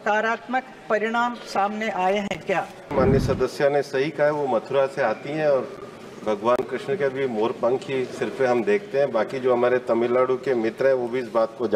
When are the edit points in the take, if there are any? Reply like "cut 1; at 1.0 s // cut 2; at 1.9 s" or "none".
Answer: cut 1; at 2.9 s